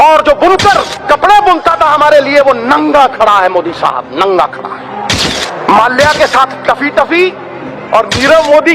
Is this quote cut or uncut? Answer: cut